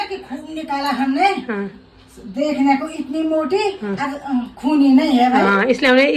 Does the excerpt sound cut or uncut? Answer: uncut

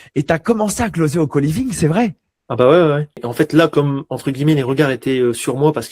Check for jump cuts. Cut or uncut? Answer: cut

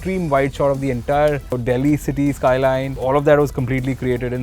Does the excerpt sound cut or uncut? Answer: cut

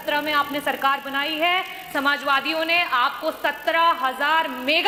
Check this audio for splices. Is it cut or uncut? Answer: uncut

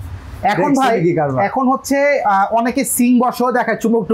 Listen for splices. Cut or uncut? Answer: uncut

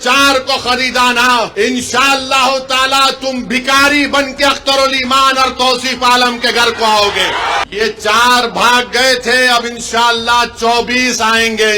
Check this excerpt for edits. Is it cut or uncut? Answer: cut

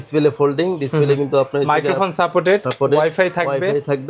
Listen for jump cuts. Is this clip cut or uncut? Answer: uncut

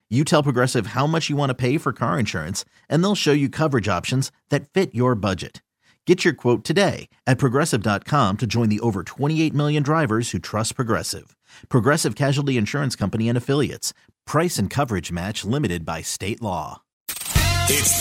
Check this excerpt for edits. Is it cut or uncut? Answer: cut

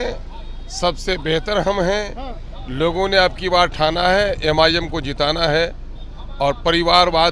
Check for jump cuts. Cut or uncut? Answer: uncut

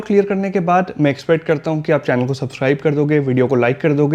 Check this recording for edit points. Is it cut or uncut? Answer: uncut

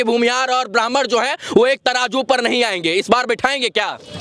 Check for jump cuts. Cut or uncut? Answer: uncut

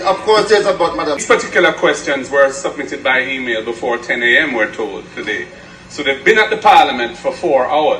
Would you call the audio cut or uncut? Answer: cut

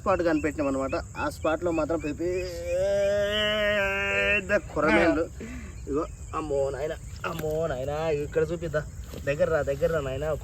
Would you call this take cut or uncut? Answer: uncut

